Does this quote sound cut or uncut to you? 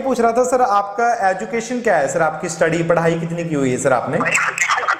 uncut